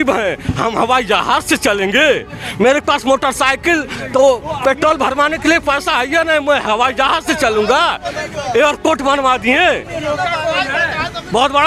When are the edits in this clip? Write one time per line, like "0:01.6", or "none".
none